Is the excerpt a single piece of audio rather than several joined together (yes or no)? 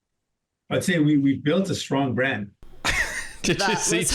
no